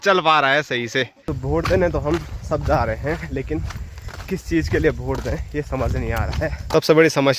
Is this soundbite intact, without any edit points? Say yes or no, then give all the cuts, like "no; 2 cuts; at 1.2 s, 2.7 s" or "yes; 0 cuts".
no; 2 cuts; at 1.2 s, 6.6 s